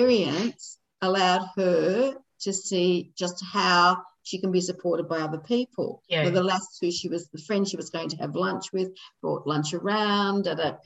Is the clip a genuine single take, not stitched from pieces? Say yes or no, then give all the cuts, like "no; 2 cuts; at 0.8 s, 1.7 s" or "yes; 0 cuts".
yes; 0 cuts